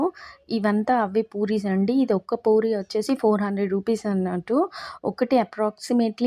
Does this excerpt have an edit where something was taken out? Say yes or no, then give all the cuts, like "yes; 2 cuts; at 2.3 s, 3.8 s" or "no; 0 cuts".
no; 0 cuts